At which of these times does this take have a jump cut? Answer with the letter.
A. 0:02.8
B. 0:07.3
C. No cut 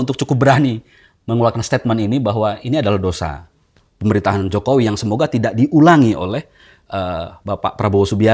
C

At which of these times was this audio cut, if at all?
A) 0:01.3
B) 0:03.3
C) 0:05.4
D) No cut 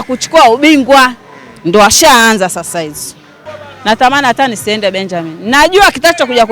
B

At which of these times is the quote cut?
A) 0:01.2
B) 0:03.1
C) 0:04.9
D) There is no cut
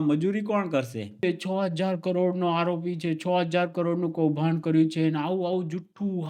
A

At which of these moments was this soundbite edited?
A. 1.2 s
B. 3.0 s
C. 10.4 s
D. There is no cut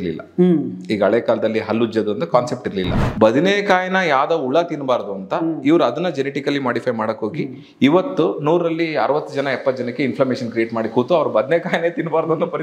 B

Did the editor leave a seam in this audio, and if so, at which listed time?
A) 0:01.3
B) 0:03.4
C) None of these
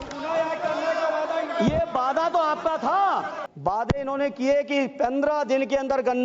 B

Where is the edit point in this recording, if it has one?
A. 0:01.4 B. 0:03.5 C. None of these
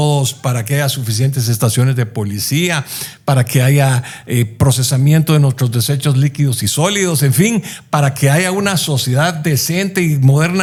C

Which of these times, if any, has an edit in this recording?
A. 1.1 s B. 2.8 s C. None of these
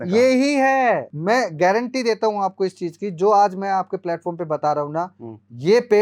A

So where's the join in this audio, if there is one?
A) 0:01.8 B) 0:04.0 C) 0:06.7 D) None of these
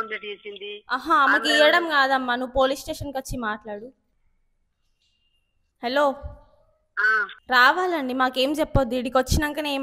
D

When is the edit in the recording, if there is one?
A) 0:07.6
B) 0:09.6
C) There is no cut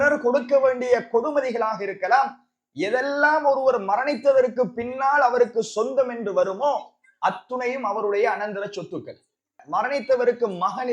B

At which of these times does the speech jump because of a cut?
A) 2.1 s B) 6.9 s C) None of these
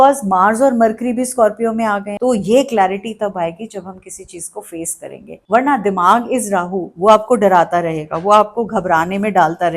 A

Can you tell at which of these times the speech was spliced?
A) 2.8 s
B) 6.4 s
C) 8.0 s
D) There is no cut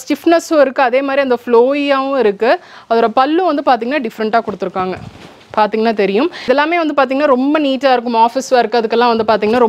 B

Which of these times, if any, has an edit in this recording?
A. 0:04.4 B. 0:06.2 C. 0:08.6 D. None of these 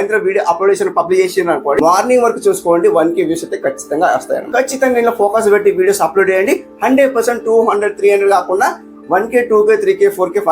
A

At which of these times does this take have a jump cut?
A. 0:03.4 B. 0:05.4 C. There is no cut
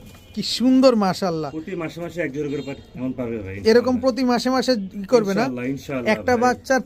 C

